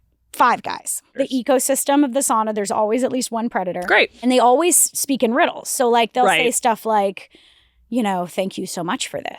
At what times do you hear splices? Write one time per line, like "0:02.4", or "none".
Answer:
0:01.0
0:04.2